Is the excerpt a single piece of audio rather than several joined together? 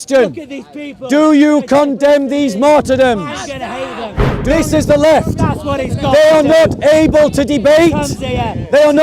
no; 1 cut; at 4.3 s

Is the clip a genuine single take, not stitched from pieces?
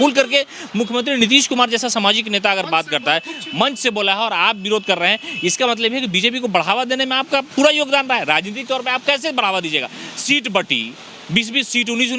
yes; 0 cuts

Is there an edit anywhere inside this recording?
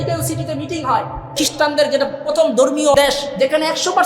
yes; 2 cuts; at 1.4 s, 3.0 s

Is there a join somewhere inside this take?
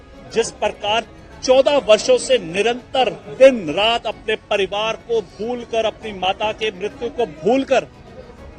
no; 0 cuts

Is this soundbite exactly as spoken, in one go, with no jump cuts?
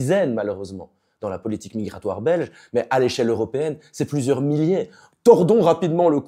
no; 1 cut; at 5.0 s

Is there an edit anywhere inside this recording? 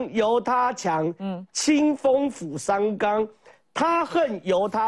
no; 0 cuts

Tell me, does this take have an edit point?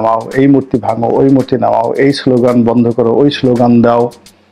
no; 0 cuts

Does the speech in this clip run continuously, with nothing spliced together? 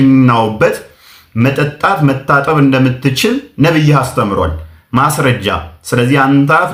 yes; 0 cuts

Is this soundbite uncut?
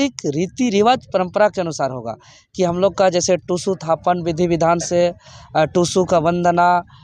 yes; 0 cuts

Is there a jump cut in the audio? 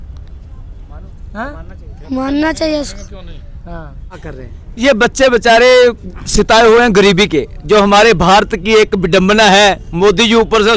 yes; 1 cut; at 4.3 s

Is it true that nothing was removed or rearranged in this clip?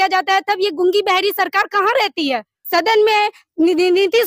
no; 1 cut; at 2.5 s

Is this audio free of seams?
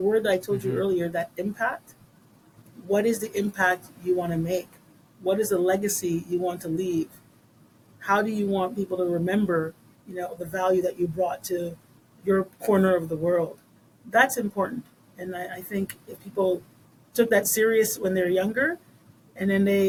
yes; 0 cuts

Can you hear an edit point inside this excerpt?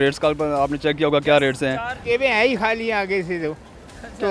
yes; 1 cut; at 1.9 s

